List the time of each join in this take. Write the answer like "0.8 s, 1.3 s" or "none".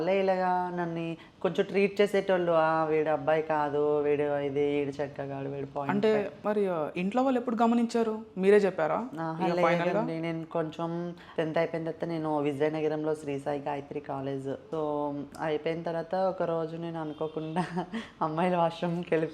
6.4 s, 11.2 s, 14.6 s